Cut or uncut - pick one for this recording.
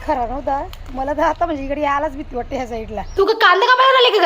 cut